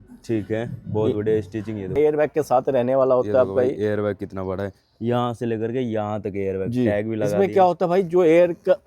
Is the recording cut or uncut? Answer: cut